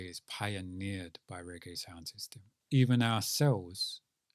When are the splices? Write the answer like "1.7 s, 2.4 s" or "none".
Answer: 2.5 s